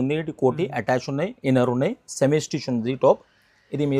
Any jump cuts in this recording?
no; 0 cuts

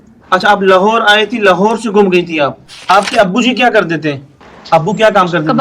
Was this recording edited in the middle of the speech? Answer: yes; 1 cut; at 2.7 s

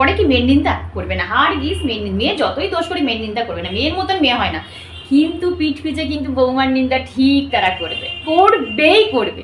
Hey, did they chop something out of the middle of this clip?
no; 0 cuts

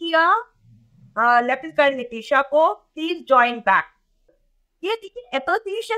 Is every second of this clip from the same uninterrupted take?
no; 1 cut; at 4.4 s

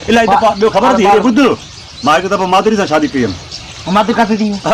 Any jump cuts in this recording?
no; 0 cuts

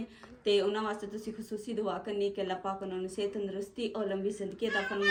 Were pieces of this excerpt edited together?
no; 0 cuts

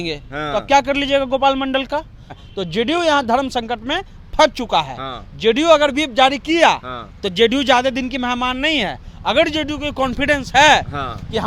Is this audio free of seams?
no; 1 cut; at 2.3 s

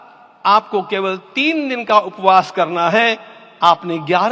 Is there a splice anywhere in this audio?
no; 0 cuts

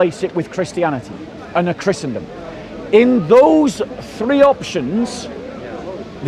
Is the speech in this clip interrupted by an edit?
no; 0 cuts

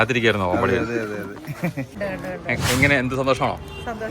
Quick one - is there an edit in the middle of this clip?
yes; 1 cut; at 1.9 s

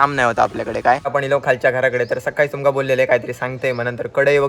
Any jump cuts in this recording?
yes; 1 cut; at 1.1 s

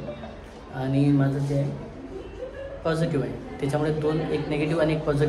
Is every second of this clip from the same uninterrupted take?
yes; 0 cuts

